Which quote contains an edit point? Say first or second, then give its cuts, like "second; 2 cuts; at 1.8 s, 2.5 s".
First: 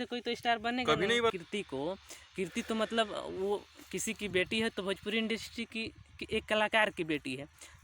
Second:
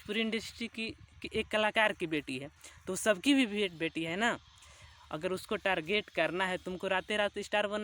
first; 1 cut; at 1.3 s